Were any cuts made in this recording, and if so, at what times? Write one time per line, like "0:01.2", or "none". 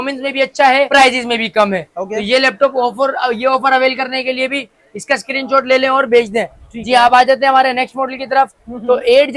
none